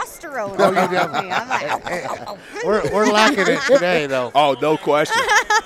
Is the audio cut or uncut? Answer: uncut